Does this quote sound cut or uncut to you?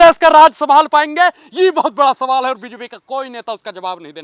uncut